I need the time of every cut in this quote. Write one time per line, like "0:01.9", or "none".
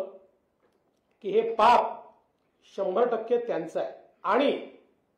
0:04.1